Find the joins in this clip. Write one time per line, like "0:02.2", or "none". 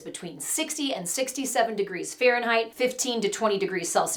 none